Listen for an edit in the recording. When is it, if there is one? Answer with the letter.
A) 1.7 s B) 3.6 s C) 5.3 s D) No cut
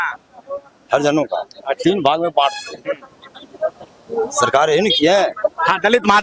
D